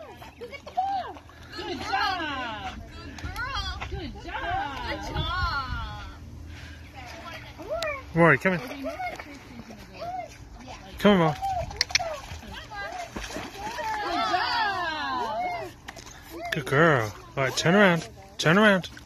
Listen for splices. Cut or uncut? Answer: cut